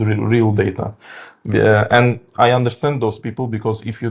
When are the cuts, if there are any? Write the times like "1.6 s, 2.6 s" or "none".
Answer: none